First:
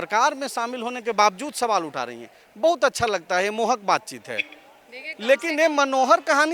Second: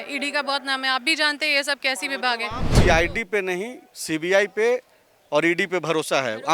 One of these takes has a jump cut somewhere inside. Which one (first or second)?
second